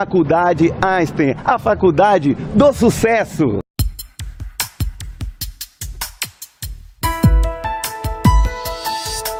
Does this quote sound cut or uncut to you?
uncut